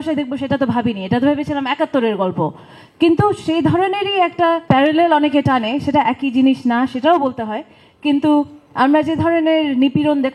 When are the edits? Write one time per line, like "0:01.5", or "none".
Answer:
none

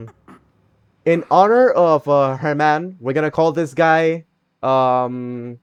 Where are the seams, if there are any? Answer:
none

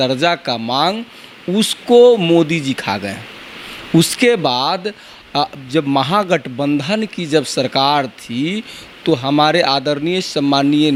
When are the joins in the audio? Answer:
none

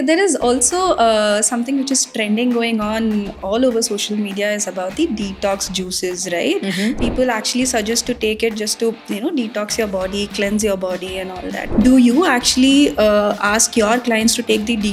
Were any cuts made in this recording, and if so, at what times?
0:07.0
0:11.7

